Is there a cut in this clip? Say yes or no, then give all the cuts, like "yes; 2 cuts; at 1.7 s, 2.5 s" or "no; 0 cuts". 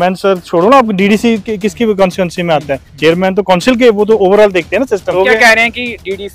yes; 1 cut; at 5.1 s